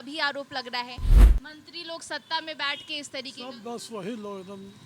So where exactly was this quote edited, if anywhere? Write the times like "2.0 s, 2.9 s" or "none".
1.1 s